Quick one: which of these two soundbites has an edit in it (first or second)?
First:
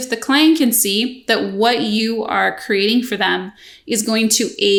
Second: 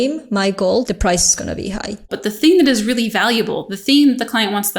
second